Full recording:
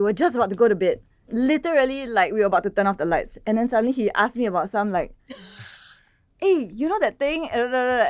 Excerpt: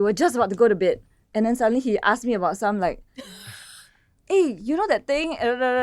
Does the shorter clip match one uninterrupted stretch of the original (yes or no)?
no